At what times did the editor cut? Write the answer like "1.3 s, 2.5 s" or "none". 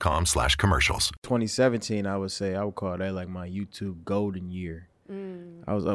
1.1 s

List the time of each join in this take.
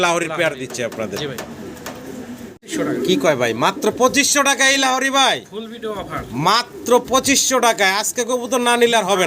2.7 s

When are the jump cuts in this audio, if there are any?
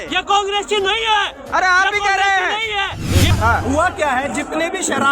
3.3 s

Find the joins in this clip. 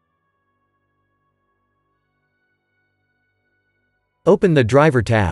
4.2 s

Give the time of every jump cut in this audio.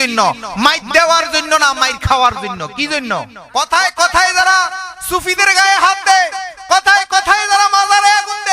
3.3 s

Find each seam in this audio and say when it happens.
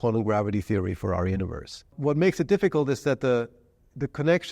1.9 s

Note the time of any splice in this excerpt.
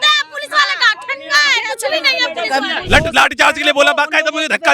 2.8 s

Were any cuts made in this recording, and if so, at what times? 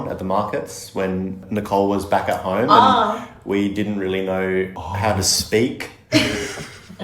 1.4 s, 4.8 s

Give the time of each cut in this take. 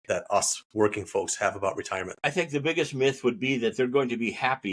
2.1 s

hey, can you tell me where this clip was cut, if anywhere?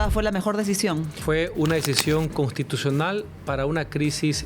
1.1 s, 3.3 s

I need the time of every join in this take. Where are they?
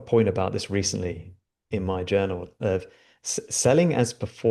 none

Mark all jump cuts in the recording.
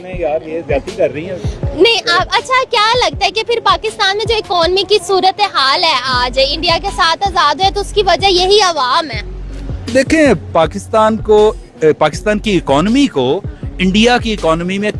none

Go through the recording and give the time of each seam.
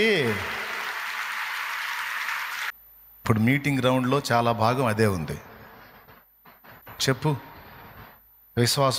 2.7 s, 6.8 s

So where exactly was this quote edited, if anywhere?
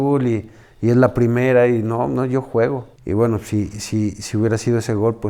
2.9 s

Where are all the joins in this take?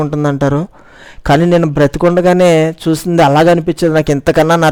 none

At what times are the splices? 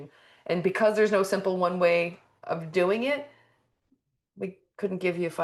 none

